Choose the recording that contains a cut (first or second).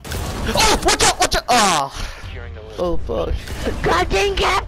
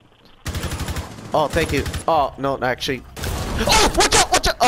first